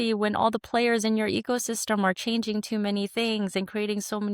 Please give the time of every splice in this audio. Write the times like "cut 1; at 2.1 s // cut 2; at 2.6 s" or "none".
none